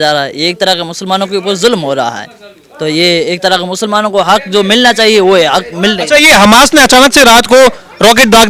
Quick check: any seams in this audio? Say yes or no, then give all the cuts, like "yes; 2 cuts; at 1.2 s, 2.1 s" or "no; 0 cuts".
no; 0 cuts